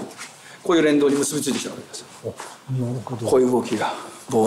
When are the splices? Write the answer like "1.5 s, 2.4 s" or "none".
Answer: none